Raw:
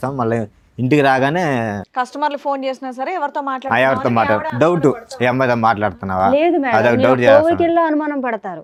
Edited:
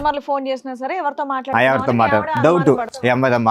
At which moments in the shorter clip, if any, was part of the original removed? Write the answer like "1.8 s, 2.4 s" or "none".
none

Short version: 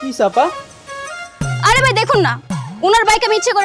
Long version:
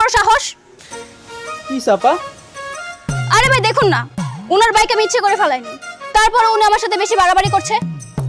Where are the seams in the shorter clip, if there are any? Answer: none

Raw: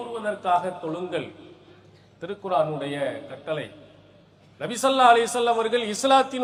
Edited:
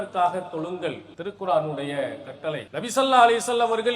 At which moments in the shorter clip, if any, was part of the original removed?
1.1 s, 2.7 s

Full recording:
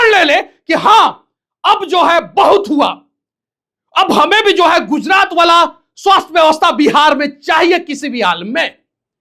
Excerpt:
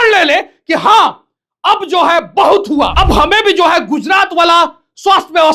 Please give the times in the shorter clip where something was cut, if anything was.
2.9 s

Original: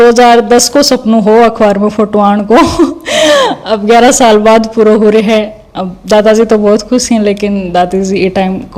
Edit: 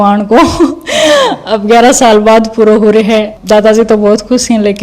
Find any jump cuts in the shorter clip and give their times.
3.4 s

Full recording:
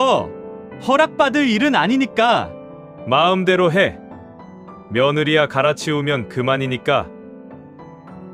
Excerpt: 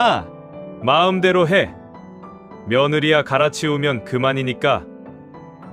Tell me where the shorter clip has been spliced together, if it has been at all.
4.8 s

